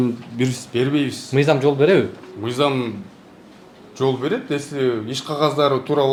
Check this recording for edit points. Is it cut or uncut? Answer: uncut